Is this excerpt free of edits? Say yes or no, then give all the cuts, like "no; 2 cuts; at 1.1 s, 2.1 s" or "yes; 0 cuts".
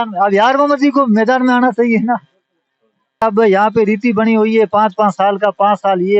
no; 1 cut; at 3.2 s